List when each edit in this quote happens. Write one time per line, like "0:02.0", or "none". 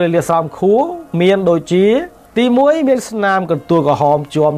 0:02.2